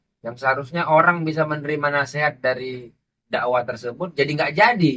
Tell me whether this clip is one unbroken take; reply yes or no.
yes